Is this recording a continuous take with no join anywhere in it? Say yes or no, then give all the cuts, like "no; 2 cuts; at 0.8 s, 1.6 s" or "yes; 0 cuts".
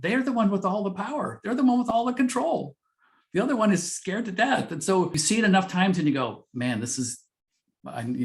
no; 1 cut; at 5.2 s